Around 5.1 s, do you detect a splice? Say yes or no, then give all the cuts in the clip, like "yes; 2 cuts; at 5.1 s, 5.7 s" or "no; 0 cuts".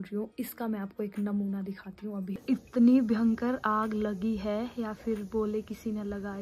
no; 1 cut; at 2.3 s